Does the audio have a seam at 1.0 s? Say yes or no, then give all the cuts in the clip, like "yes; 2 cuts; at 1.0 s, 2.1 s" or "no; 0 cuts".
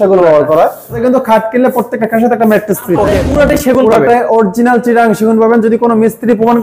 yes; 2 cuts; at 1.0 s, 3.2 s